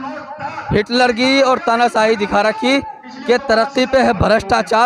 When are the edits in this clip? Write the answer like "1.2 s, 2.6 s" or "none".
none